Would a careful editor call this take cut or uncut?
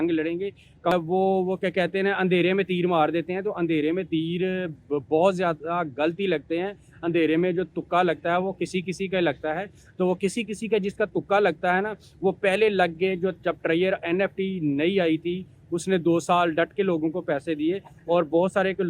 cut